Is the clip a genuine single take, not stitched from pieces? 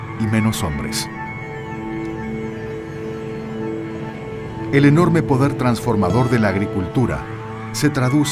yes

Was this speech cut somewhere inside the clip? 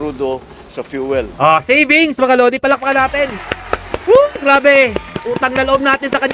yes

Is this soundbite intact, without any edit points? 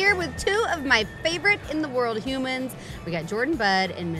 yes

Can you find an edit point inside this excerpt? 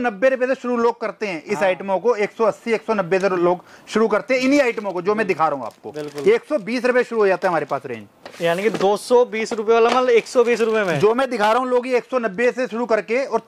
no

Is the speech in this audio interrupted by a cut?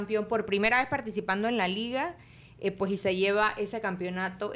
no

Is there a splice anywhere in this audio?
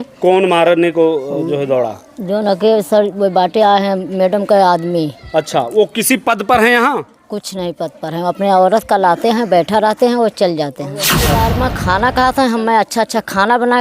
yes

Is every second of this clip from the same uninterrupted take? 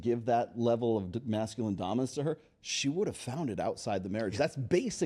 yes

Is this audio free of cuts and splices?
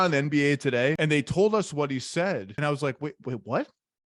no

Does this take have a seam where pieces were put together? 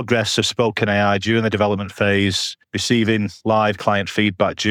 no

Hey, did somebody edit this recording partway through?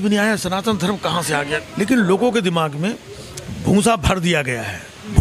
yes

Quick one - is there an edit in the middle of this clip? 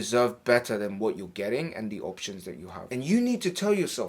yes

